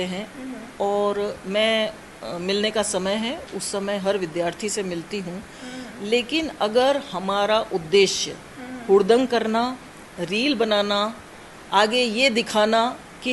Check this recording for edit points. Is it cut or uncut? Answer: uncut